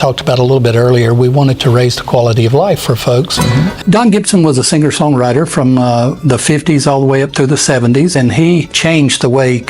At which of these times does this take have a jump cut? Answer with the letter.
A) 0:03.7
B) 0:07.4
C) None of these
A